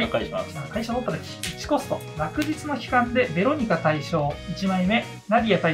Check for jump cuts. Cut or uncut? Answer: uncut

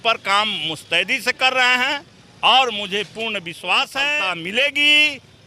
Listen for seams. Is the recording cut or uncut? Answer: cut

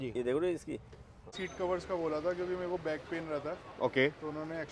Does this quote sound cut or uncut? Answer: cut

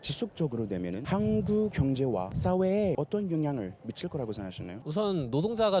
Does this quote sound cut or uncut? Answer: cut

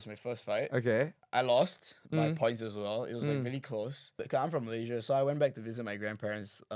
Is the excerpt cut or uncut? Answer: cut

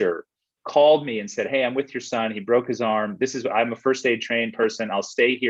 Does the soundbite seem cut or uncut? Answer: uncut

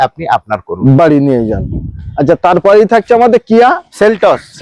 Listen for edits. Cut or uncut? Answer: uncut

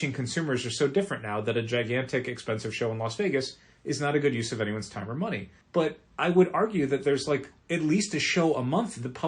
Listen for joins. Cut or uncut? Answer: cut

